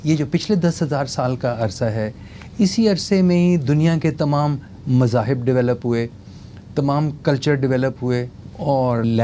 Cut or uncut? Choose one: uncut